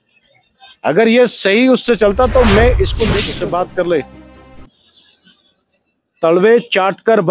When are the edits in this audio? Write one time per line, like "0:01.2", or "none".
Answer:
0:03.2